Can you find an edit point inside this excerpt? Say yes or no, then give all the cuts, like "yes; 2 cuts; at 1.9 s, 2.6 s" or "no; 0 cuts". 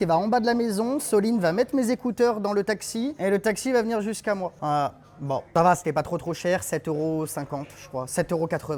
no; 0 cuts